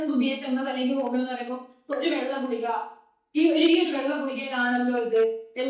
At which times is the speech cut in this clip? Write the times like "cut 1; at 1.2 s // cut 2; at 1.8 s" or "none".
none